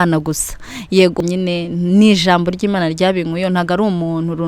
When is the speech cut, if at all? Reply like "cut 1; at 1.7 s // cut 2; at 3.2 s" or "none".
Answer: cut 1; at 1.2 s